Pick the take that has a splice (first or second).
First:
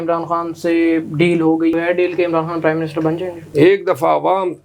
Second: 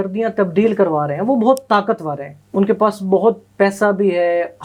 first